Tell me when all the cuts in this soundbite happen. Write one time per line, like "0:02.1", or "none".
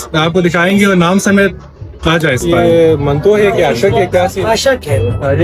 0:02.4

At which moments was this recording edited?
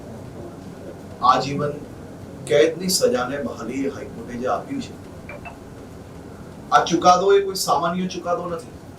none

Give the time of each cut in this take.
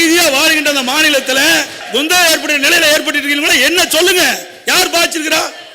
0:01.8

